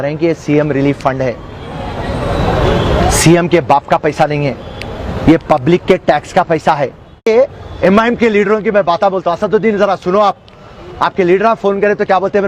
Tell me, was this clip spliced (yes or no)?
yes